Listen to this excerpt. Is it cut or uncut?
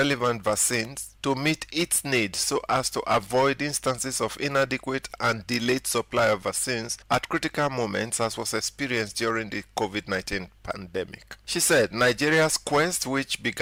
uncut